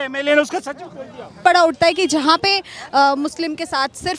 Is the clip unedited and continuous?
no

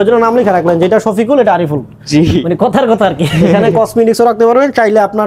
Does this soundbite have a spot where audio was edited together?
yes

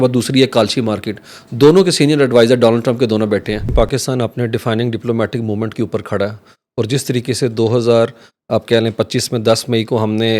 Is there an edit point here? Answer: yes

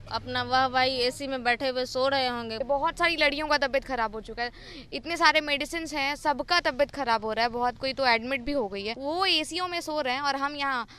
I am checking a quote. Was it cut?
yes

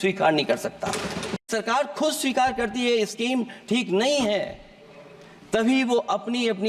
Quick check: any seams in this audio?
yes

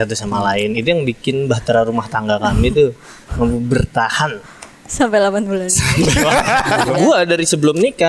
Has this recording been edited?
yes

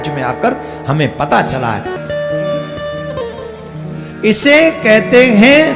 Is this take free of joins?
yes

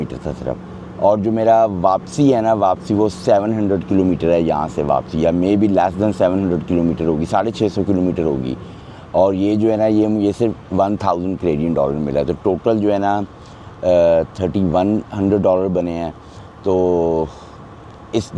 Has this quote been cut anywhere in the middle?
no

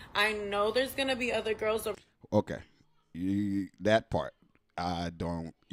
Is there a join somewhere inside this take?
no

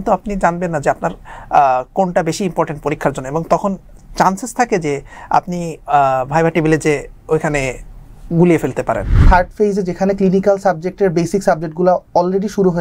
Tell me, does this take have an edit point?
yes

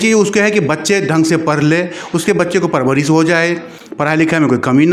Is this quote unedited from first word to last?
yes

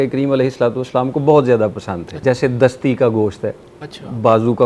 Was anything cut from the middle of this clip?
yes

